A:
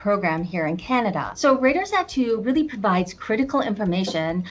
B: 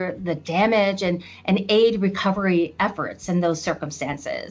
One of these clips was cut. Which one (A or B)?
A